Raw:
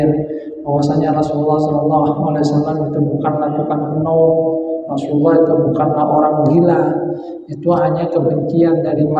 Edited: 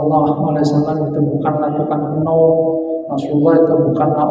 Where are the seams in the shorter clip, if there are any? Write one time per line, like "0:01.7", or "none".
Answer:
none